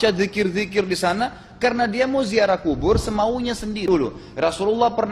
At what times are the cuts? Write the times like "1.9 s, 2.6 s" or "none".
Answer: 3.8 s